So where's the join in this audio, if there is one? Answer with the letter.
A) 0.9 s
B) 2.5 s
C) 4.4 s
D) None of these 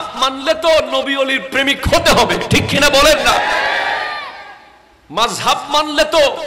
D